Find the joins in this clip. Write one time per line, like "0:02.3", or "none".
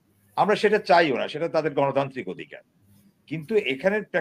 none